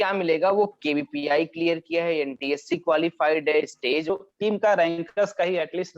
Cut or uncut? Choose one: cut